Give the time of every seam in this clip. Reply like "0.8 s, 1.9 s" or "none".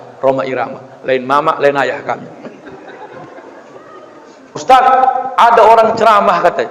4.6 s